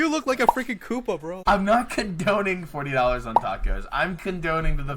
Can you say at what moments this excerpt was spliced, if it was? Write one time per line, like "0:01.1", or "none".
0:01.3